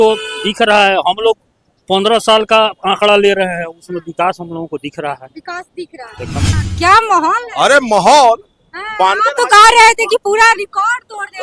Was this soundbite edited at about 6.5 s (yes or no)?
yes